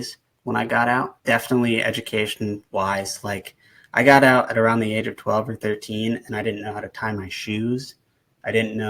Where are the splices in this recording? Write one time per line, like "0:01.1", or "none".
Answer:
0:01.1

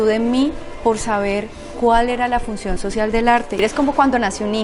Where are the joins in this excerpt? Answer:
0:03.6

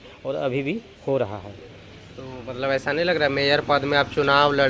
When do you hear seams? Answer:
none

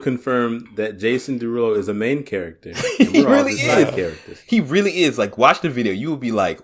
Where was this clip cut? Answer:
none

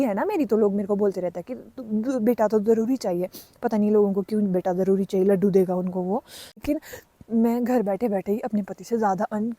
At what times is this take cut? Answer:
0:06.6

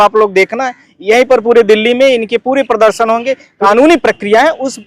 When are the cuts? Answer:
0:03.5

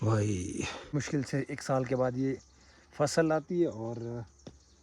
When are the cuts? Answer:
0:00.9

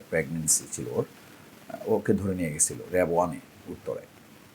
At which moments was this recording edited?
none

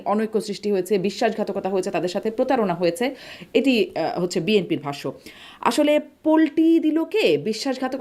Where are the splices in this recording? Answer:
none

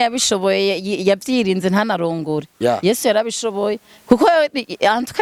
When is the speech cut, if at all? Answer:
none

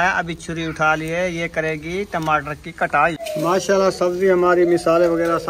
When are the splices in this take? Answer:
0:03.2

